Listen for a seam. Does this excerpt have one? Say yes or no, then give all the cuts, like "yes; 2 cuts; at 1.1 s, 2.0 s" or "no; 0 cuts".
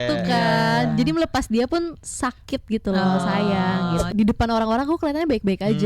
yes; 1 cut; at 4.1 s